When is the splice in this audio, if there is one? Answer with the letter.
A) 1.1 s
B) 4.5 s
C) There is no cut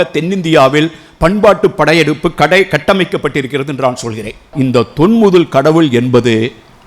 B